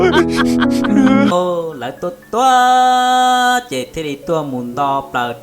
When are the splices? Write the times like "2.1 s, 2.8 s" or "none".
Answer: 1.3 s